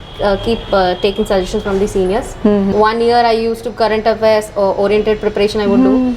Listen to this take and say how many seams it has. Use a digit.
1